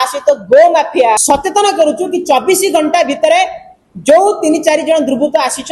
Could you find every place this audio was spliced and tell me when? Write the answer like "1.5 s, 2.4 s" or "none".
1.2 s